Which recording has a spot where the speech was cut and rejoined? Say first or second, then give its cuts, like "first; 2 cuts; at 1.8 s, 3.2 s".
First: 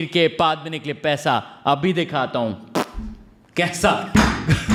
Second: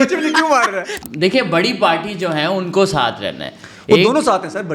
second; 1 cut; at 1.0 s